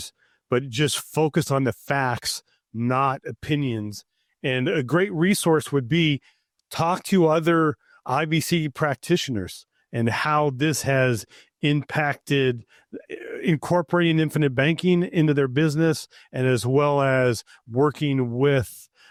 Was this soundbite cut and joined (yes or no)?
no